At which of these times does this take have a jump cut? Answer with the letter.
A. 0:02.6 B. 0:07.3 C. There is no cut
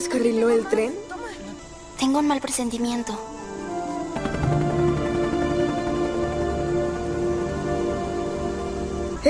C